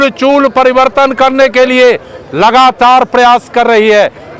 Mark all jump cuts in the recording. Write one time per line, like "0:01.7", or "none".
none